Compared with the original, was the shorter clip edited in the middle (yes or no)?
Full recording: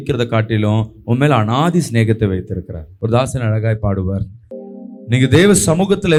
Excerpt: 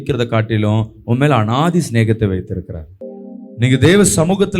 yes